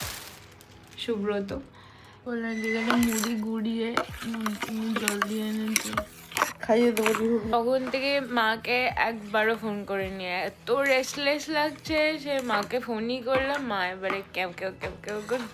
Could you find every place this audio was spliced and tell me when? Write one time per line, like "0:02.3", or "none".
0:02.2
0:06.2
0:07.5